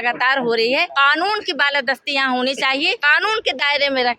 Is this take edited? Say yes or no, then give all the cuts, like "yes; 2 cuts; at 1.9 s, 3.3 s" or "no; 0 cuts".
yes; 2 cuts; at 0.9 s, 3.1 s